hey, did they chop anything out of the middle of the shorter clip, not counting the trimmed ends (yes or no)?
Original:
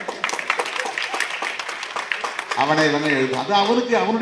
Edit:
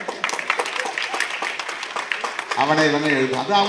no